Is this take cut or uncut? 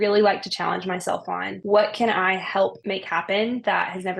cut